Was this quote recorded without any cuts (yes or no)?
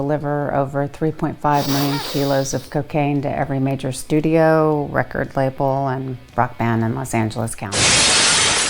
no